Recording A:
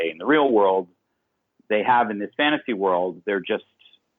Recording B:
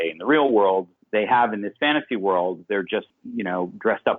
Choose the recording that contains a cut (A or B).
B